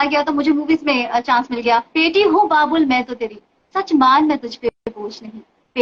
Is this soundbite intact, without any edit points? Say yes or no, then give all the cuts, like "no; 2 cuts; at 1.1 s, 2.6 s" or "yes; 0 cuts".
no; 1 cut; at 1.9 s